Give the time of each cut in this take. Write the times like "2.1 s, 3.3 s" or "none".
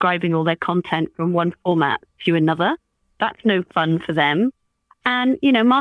3.0 s